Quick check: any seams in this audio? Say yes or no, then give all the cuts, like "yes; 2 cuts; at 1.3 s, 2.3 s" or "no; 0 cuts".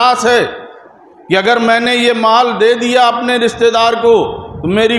no; 0 cuts